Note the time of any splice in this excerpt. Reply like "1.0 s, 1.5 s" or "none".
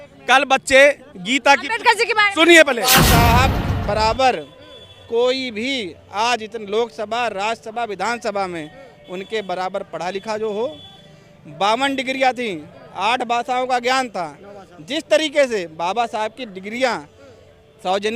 2.9 s